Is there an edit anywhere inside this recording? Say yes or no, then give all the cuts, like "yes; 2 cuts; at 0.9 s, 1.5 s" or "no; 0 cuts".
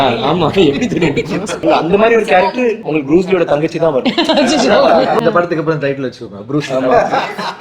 yes; 3 cuts; at 1.6 s, 2.8 s, 5.2 s